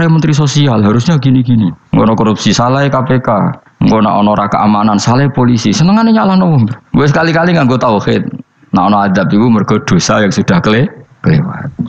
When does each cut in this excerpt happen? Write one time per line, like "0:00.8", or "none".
0:01.8
0:03.6